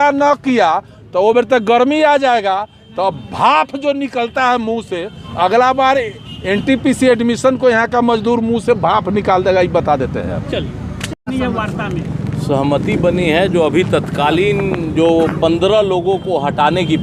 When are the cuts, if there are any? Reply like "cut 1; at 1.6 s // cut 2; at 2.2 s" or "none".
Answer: none